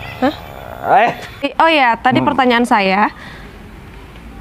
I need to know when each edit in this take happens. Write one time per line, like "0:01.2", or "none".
0:01.5